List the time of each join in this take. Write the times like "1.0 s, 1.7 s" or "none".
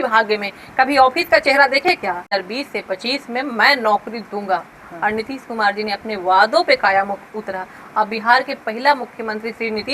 2.3 s